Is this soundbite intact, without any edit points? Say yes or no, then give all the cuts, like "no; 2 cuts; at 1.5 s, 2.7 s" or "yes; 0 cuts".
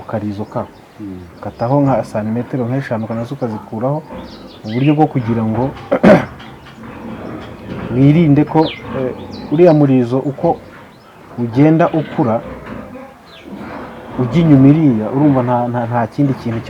yes; 0 cuts